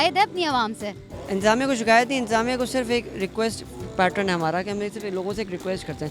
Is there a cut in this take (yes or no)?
no